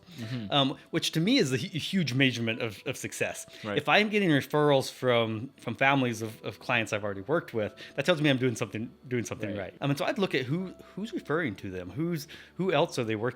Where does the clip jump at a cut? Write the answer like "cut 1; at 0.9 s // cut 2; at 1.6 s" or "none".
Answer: cut 1; at 9.7 s